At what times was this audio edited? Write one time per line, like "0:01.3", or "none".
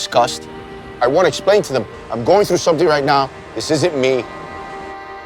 0:01.0